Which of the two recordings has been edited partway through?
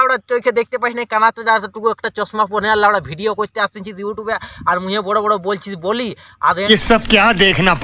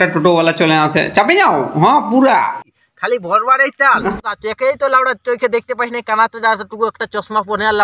second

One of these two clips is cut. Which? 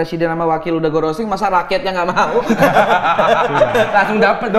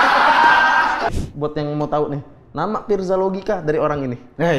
second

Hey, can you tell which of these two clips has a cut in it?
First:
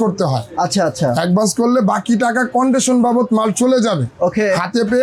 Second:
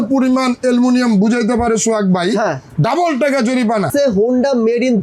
second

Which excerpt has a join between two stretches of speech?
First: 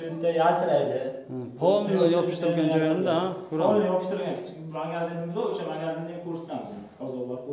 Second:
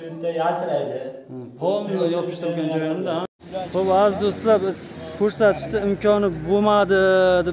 second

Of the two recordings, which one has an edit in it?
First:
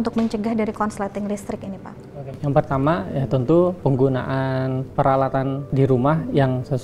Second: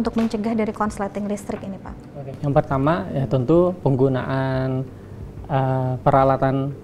first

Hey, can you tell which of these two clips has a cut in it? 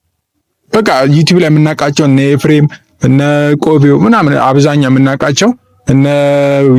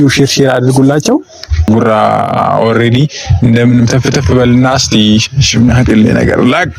second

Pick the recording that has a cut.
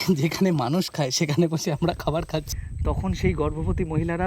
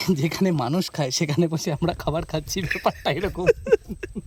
first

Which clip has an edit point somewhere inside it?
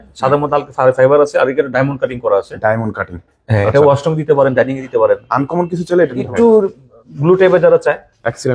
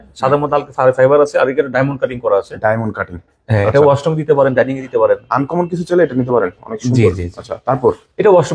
first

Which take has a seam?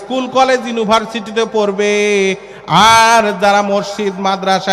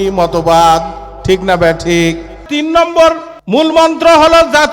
second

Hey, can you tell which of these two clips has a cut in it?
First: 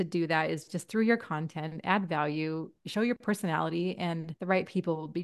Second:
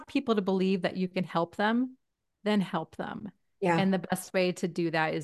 first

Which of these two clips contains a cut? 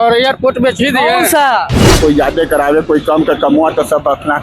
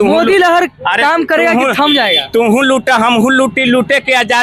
first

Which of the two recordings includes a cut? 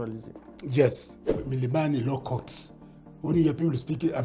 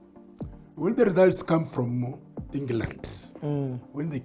first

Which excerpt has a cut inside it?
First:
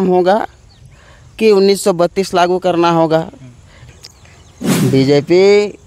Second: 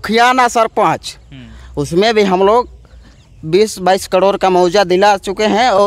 first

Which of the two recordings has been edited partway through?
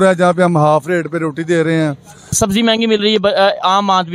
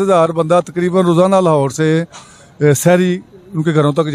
first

